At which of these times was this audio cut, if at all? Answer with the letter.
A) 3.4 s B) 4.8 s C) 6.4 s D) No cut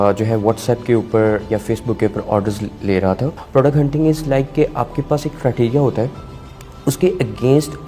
A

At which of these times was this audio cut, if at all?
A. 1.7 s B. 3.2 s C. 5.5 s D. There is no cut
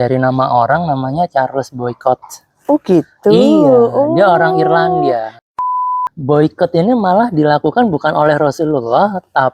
C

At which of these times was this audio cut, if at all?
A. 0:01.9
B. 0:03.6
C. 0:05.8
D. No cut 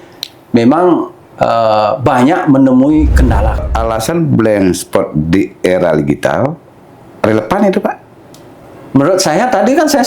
B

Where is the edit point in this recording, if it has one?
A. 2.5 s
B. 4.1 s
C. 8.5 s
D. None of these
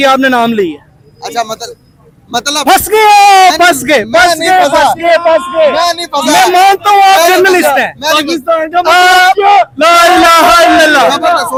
D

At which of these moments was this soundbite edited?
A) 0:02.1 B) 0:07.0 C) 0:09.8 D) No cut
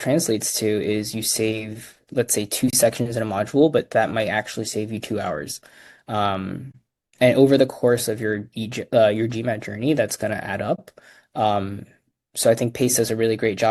D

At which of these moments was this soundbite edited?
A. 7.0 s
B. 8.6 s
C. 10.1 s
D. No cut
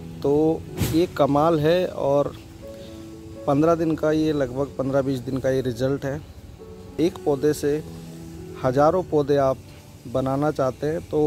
A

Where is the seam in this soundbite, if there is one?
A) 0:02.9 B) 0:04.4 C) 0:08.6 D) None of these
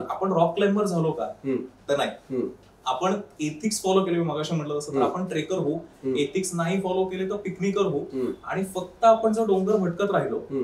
D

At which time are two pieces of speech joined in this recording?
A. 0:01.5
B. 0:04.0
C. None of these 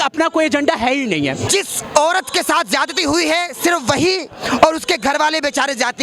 A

